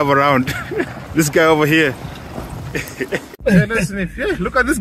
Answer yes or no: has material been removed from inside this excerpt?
yes